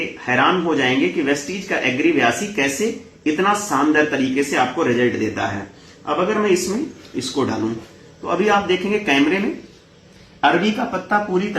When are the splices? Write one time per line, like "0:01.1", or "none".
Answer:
none